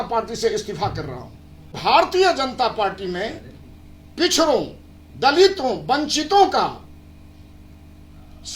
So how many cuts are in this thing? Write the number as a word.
one